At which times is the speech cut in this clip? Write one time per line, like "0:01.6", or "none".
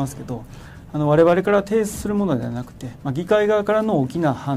none